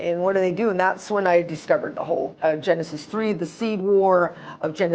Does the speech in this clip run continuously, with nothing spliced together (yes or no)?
no